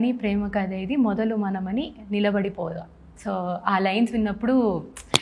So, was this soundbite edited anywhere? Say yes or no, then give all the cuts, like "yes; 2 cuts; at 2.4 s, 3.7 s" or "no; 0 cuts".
no; 0 cuts